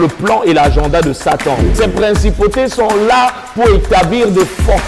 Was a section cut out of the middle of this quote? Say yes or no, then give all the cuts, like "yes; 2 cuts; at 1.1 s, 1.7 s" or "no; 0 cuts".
yes; 1 cut; at 1.7 s